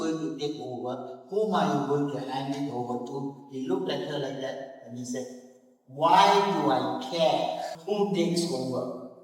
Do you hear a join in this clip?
yes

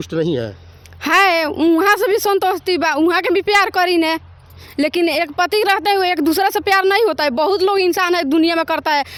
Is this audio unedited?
yes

